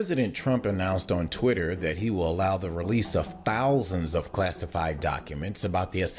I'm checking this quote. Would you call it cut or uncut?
uncut